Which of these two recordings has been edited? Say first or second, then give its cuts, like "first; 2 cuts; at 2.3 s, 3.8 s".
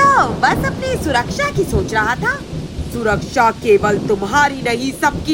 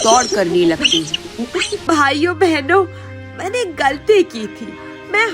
second; 1 cut; at 1.8 s